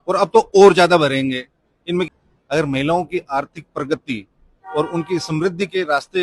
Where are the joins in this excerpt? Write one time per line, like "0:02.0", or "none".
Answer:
0:02.1